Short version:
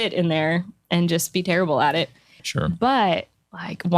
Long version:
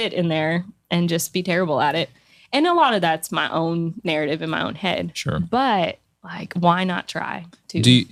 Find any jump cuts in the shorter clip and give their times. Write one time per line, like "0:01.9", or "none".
0:02.4